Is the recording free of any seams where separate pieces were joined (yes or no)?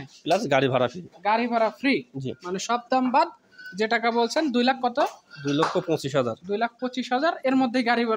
yes